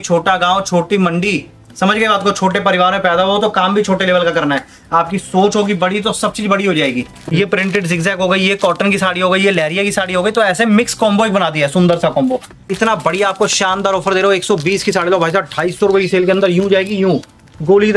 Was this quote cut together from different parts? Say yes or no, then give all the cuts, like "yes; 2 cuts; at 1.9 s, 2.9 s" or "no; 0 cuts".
yes; 2 cuts; at 7.2 s, 12.5 s